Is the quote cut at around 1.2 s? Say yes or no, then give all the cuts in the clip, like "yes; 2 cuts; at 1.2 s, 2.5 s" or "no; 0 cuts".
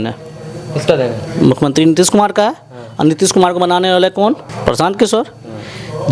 no; 1 cut; at 4.5 s